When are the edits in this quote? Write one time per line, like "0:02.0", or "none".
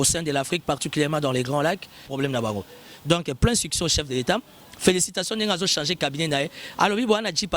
0:02.0